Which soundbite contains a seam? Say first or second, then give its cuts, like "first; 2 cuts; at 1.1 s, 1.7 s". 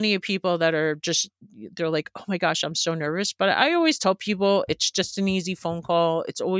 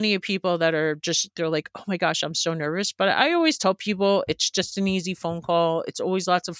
second; 1 cut; at 1.3 s